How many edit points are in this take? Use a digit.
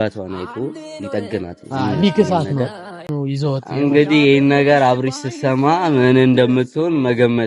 1